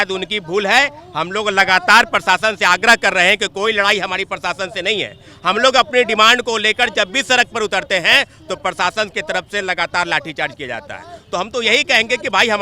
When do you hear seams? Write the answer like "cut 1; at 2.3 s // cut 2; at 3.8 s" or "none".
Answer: none